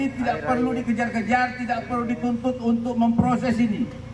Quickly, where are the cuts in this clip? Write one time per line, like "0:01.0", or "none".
none